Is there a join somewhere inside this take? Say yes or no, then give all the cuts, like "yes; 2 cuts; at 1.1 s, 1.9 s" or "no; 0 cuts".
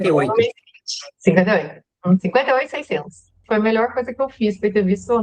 yes; 1 cut; at 3.4 s